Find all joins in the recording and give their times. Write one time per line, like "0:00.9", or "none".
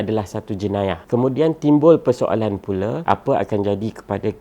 0:01.0
0:03.0